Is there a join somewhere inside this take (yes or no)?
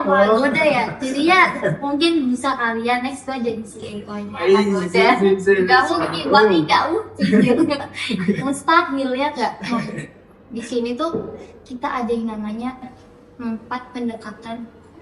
no